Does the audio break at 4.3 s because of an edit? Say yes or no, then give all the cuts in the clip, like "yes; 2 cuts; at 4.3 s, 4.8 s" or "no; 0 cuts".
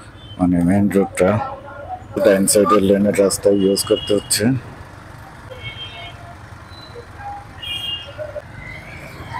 no; 3 cuts; at 2.2 s, 5.5 s, 8.4 s